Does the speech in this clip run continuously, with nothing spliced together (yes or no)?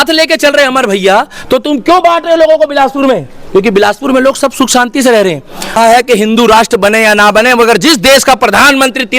no